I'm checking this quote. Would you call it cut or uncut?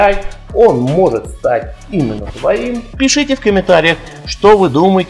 cut